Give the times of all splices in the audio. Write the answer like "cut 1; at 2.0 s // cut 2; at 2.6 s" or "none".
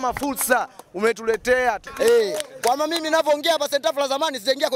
cut 1; at 1.9 s